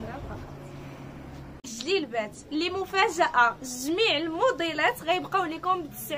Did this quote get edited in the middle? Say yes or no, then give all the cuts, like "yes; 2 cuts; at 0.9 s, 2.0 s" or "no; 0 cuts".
yes; 1 cut; at 1.7 s